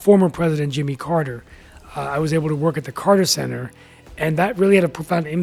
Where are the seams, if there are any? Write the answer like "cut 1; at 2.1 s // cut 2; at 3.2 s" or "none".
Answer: none